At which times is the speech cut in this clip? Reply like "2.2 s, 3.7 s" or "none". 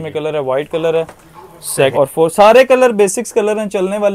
1.9 s